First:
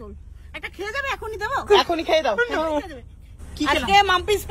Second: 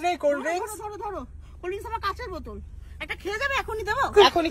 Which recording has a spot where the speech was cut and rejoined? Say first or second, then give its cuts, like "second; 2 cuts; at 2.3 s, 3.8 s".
first; 1 cut; at 3.3 s